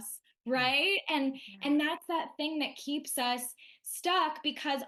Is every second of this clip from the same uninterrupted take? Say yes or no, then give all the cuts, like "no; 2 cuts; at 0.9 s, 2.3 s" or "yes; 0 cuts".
yes; 0 cuts